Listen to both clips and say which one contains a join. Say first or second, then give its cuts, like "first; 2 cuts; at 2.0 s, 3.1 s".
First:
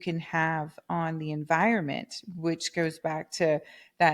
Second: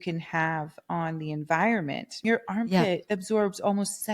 second; 1 cut; at 2.2 s